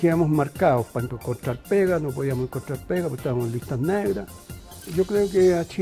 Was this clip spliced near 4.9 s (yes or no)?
yes